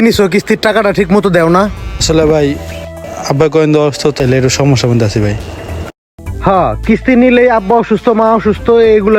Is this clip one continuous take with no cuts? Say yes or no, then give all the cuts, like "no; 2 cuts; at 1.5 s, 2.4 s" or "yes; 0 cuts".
no; 2 cuts; at 2.0 s, 4.2 s